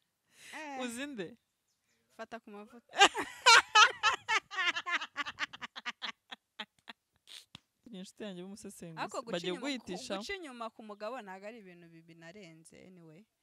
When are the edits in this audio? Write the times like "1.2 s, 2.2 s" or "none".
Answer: 7.9 s